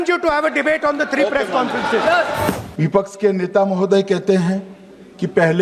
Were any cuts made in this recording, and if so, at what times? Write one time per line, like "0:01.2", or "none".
0:02.6